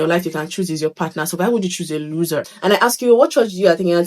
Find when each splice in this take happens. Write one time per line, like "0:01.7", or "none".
0:02.5